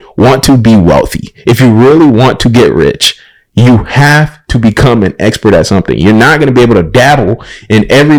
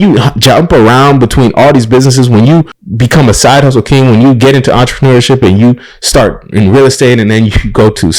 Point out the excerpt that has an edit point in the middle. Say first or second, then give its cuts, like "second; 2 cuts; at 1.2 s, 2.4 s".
second; 1 cut; at 2.8 s